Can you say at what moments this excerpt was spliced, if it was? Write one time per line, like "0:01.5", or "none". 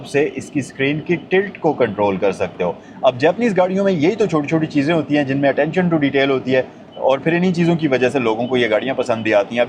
none